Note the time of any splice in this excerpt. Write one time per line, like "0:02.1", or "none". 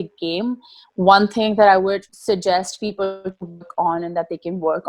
none

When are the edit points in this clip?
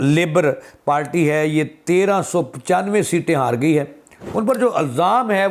0:04.2

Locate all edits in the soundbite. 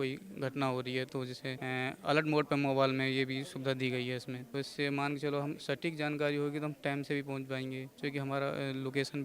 0:01.6
0:04.4
0:07.9

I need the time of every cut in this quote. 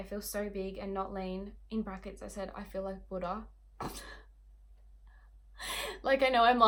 none

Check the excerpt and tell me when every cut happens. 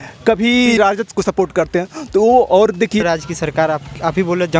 0:00.8
0:03.0

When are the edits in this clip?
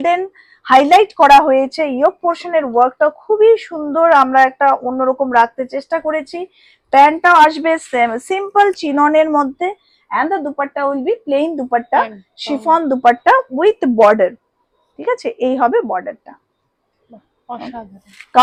none

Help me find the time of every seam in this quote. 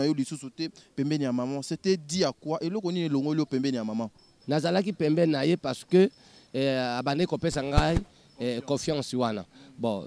0:04.3

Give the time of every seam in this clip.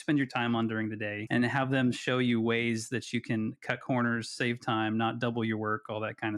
0:01.1

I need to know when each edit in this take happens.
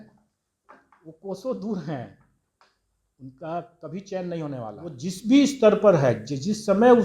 0:05.1

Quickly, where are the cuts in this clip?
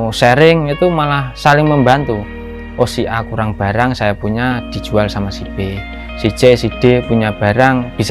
none

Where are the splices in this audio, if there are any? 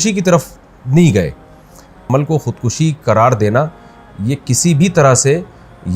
0:02.0

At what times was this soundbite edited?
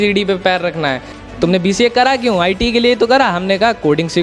0:01.1

